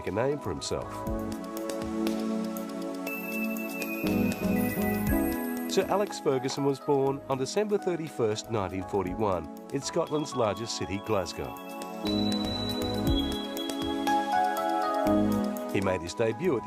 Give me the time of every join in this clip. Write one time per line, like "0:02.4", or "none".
none